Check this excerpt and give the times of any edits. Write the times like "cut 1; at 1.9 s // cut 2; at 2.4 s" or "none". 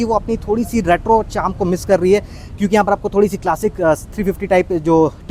none